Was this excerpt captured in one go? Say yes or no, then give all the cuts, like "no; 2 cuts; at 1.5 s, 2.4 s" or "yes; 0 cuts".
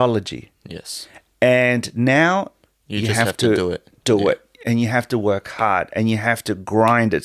yes; 0 cuts